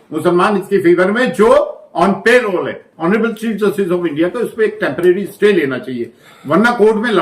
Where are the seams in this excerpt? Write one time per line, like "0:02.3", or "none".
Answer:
0:02.9